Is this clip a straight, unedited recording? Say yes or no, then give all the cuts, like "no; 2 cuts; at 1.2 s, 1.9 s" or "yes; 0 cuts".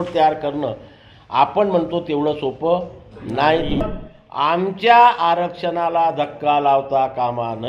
no; 1 cut; at 4.0 s